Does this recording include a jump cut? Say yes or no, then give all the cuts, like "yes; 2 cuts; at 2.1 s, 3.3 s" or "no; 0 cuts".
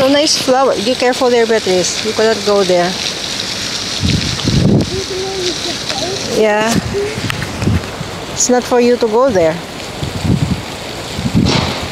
no; 0 cuts